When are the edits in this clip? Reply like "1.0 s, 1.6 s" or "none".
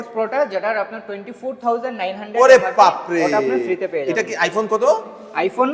none